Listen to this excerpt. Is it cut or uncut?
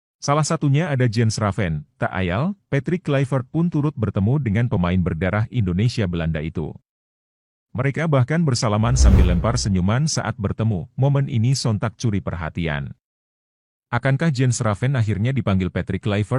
uncut